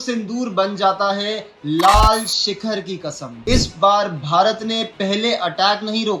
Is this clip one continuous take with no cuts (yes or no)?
no